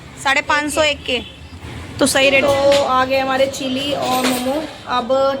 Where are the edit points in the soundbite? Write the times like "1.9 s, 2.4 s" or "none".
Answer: 2.4 s